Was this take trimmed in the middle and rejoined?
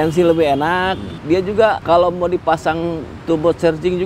yes; 2 cuts; at 1.1 s, 1.8 s

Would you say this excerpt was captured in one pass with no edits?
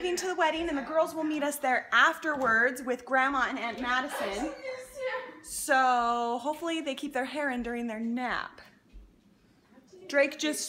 yes; 0 cuts

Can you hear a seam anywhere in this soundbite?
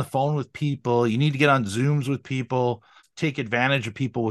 yes; 1 cut; at 3.0 s

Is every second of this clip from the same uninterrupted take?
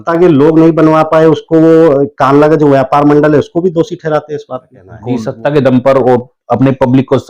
no; 1 cut; at 4.7 s

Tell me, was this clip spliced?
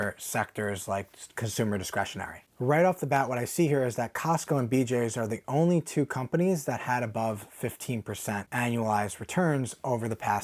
no; 0 cuts

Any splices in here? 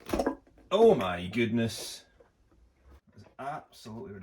yes; 1 cut; at 3.0 s

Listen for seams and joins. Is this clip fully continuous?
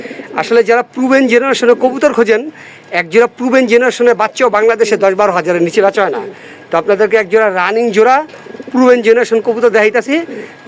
yes; 0 cuts

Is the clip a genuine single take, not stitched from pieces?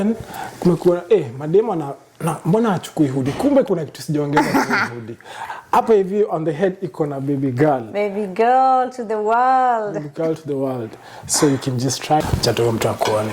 no; 1 cut; at 12.2 s

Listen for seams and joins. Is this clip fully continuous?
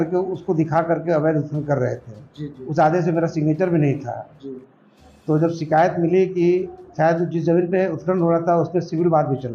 yes; 0 cuts

